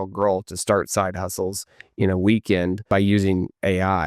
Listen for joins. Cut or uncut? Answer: cut